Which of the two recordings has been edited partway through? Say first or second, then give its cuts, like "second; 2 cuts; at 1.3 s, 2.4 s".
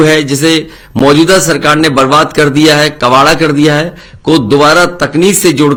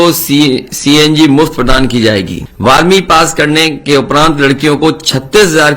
second; 1 cut; at 2.4 s